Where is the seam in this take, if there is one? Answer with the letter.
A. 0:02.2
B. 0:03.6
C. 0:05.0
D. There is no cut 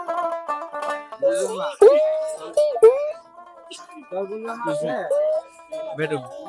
D